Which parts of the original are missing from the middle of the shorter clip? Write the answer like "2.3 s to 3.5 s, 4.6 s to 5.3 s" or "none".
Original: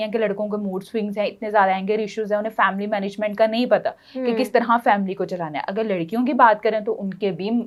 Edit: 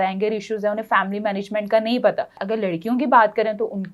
4.0 s to 5.6 s